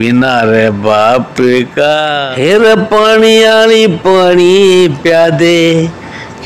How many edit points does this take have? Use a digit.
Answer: 1